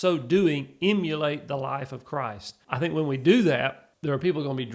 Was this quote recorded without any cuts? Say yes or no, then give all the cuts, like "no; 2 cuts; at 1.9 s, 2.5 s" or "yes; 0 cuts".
no; 2 cuts; at 2.5 s, 3.9 s